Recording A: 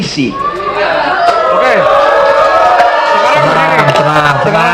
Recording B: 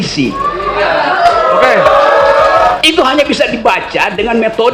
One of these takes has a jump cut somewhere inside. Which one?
B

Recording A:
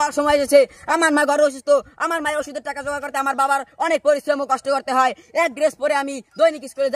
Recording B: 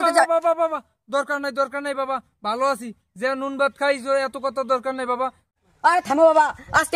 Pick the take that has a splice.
B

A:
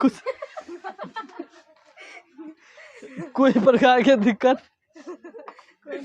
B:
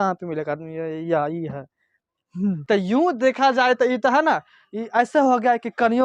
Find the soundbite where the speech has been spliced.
B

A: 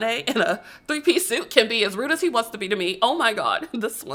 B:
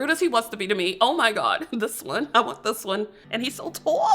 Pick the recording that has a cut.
B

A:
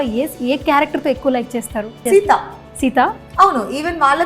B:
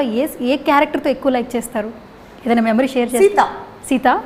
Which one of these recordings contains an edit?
A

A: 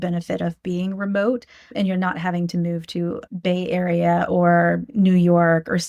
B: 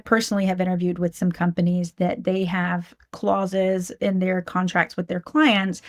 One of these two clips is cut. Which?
A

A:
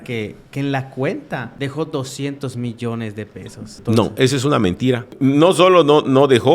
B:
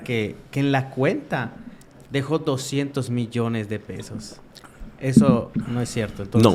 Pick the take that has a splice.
A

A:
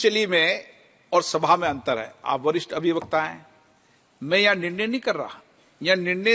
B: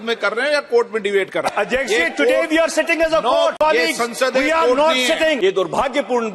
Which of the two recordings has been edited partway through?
B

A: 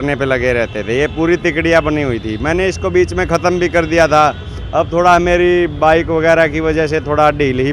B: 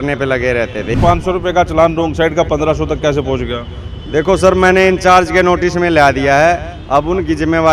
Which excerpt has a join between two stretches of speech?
B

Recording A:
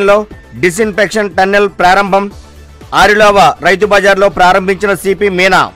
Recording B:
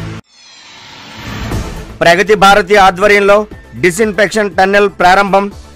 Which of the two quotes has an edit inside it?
B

